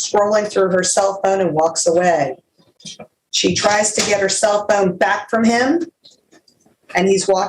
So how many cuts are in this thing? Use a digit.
0